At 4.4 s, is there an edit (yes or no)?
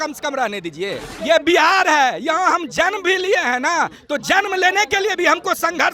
no